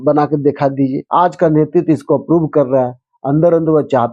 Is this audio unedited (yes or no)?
no